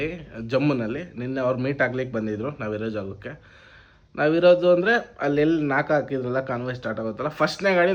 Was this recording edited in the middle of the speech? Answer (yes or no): no